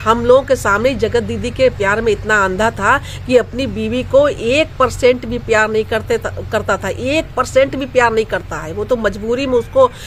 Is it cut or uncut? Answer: uncut